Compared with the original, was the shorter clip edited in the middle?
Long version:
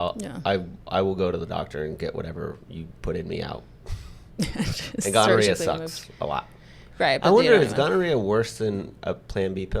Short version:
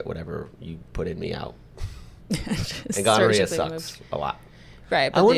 no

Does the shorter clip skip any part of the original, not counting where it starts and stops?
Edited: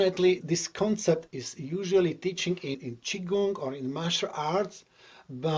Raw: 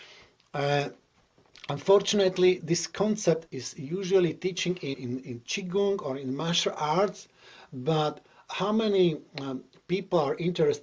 yes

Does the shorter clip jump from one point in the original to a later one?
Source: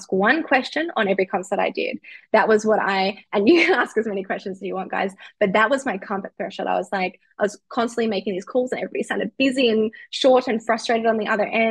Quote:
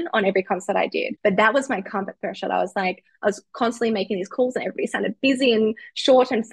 yes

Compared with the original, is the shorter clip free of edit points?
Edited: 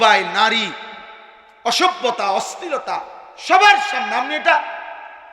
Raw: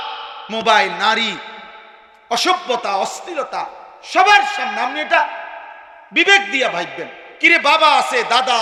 yes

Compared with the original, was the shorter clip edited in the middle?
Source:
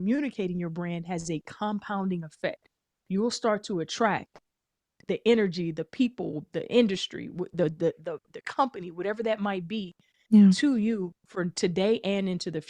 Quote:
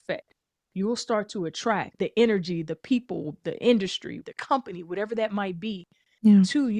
yes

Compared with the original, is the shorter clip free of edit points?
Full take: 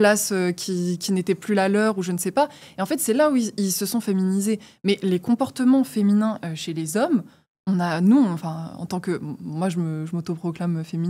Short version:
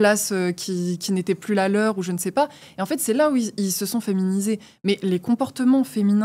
yes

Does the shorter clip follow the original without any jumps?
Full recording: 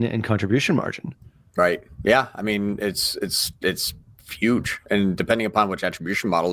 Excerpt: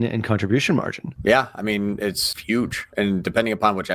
no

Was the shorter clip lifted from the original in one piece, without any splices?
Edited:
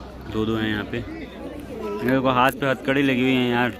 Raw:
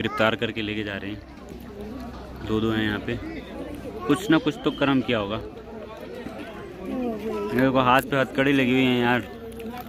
no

